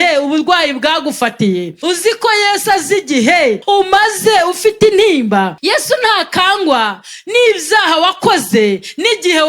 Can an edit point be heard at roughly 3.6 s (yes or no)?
yes